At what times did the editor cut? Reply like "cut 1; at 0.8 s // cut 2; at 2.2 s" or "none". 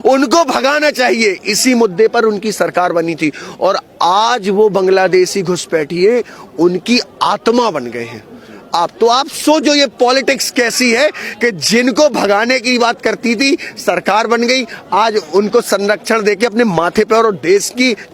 none